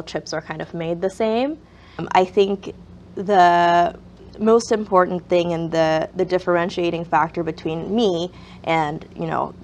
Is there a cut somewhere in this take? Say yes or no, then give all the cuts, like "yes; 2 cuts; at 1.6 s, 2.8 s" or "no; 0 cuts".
yes; 1 cut; at 2.1 s